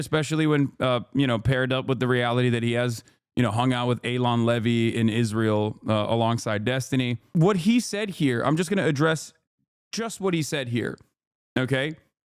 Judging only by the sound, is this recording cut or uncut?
uncut